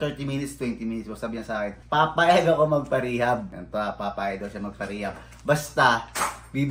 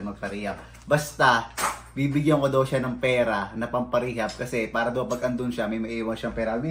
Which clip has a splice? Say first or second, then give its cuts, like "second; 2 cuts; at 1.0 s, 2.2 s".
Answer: first; 2 cuts; at 1.8 s, 3.6 s